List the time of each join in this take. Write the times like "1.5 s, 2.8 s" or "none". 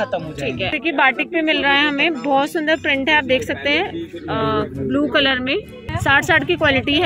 0.8 s, 5.8 s